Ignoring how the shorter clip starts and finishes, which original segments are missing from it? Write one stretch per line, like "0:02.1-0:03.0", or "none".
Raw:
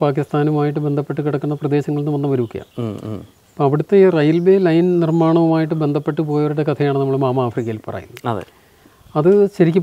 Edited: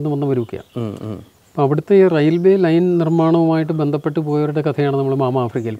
none